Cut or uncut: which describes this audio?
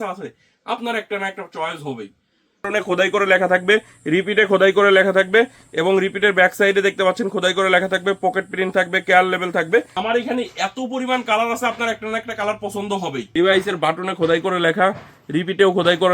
cut